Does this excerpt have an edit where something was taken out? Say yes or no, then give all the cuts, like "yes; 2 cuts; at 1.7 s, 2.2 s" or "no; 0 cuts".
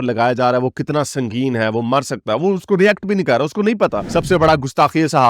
yes; 1 cut; at 4.0 s